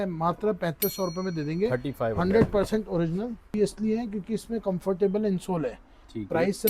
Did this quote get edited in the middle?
yes; 1 cut; at 3.5 s

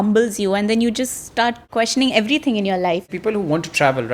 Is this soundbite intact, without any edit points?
no; 2 cuts; at 1.6 s, 3.1 s

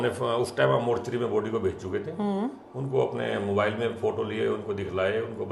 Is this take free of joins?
yes; 0 cuts

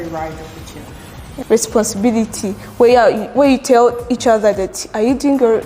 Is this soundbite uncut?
no; 1 cut; at 1.3 s

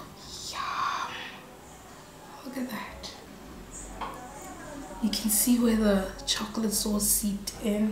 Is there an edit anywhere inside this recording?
no; 0 cuts

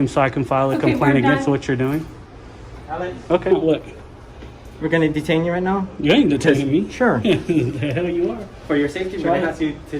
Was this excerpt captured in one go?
no; 1 cut; at 3.5 s

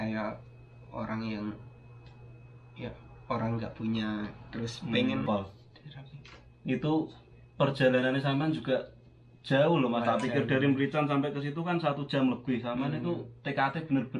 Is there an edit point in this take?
yes; 1 cut; at 5.3 s

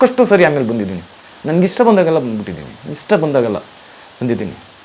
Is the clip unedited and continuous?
yes; 0 cuts

